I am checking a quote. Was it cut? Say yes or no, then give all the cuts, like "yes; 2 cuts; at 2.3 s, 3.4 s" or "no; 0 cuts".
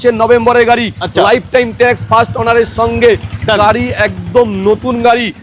no; 0 cuts